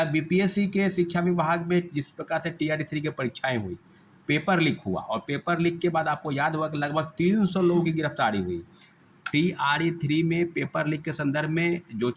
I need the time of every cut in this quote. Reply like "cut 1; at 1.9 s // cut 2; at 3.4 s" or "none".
none